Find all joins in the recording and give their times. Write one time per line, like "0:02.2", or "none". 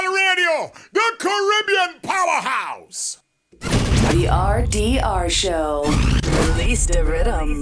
0:03.3